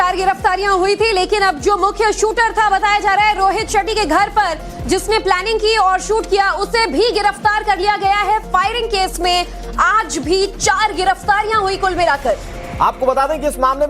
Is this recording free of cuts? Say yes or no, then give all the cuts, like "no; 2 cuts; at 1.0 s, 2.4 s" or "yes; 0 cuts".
no; 1 cut; at 7.6 s